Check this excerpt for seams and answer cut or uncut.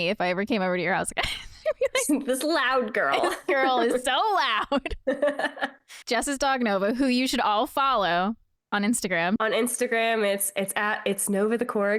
cut